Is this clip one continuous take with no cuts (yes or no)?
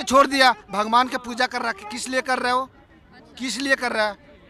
yes